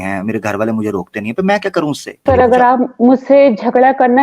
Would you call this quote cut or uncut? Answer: cut